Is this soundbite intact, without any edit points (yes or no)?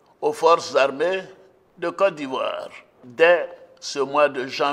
yes